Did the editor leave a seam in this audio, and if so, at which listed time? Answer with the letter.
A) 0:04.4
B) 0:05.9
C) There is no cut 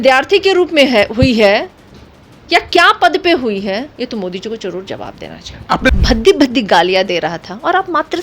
B